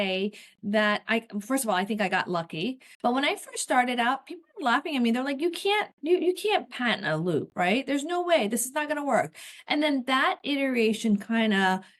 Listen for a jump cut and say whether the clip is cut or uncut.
cut